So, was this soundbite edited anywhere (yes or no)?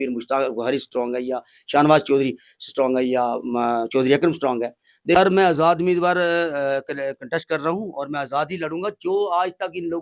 yes